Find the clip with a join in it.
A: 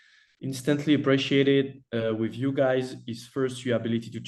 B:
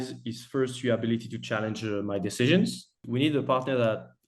B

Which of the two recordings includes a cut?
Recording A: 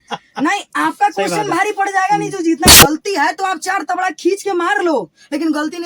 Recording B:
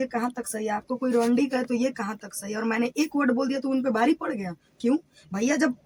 A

